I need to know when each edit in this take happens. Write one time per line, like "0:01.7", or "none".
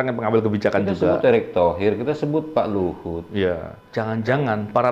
0:03.8